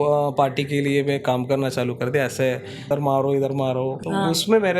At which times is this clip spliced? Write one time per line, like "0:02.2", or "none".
0:02.9
0:04.0